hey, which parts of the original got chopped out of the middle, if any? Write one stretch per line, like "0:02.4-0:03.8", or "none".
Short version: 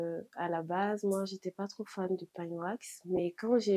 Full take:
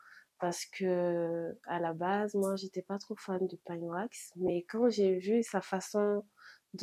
none

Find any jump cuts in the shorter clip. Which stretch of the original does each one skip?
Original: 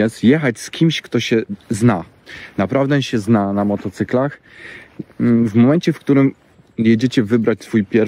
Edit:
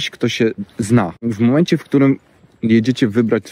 0:02.2-0:05.4

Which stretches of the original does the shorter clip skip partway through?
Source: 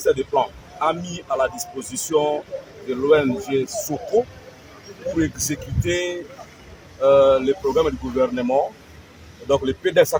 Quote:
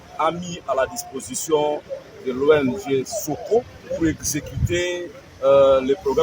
0:04.4-0:04.9
0:06.4-0:06.8

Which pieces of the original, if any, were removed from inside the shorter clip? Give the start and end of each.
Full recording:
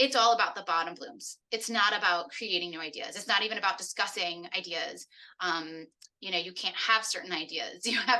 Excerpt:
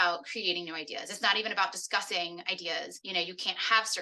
0:05.0-0:06.2

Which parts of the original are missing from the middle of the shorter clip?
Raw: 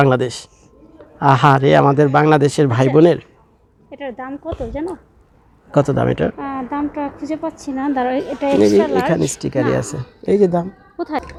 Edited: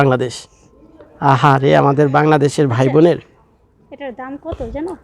none

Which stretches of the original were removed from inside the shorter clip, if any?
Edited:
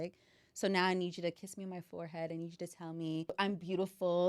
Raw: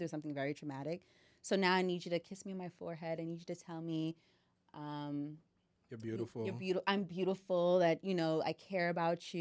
0:04.2-0:06.8

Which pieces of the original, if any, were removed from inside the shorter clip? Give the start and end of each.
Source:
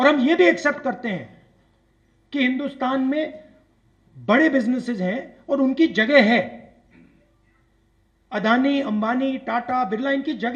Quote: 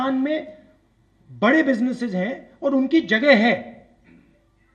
none

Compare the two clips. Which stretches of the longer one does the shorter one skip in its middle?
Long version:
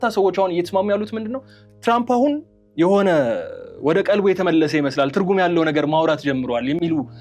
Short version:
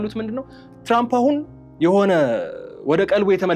none

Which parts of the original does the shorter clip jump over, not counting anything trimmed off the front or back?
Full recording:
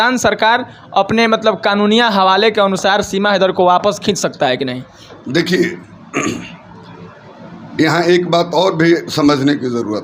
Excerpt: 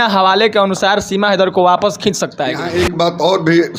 0:04.6-0:08.0

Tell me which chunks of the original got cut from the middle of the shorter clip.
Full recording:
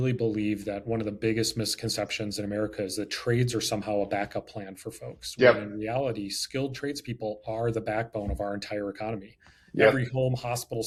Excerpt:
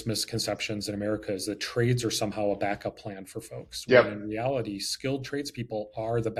none

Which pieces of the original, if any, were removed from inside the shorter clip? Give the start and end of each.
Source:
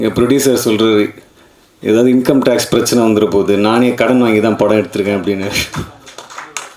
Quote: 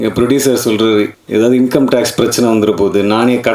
0:01.2-0:01.7

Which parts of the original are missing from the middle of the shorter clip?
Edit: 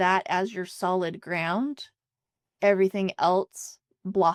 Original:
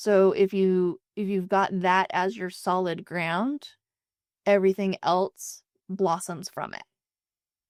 none

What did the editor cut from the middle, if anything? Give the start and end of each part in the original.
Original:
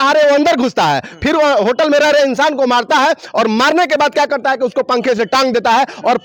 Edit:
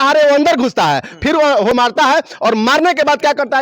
0:01.7-0:02.7

